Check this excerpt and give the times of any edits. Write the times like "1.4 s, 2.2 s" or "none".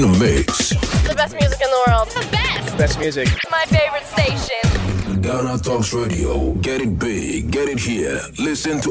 6.6 s